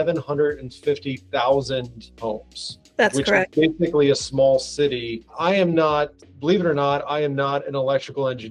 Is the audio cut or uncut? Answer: uncut